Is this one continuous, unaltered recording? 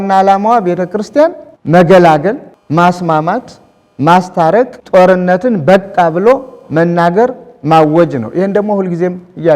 no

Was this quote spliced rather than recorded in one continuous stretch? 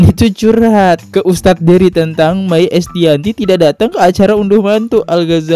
no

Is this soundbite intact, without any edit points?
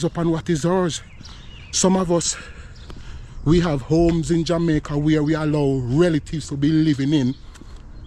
yes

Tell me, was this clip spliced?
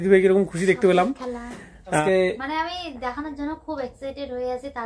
yes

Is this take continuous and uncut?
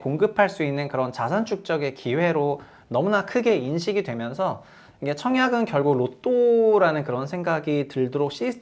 yes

